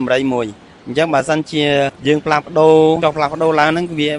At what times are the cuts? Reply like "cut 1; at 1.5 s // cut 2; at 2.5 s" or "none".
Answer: cut 1; at 2.0 s // cut 2; at 3.0 s